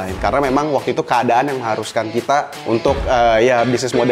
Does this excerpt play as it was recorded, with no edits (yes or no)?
no